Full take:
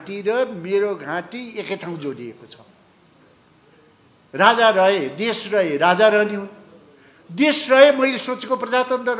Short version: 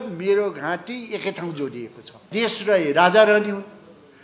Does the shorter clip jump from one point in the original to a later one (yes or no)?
yes